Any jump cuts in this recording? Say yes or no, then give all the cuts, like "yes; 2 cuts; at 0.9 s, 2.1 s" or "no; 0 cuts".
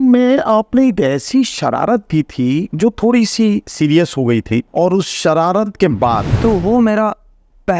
yes; 3 cuts; at 2.7 s, 4.7 s, 6.3 s